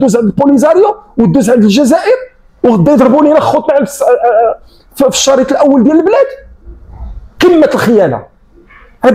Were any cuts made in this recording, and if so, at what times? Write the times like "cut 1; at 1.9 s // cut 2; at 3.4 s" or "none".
none

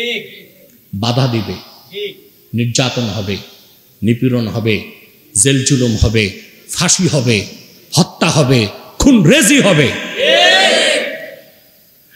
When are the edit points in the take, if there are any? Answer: none

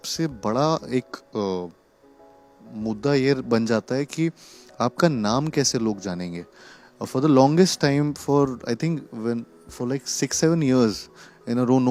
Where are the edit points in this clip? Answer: none

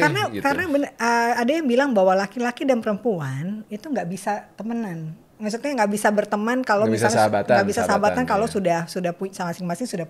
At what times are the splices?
none

